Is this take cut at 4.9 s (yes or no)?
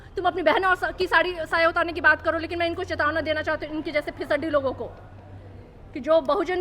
no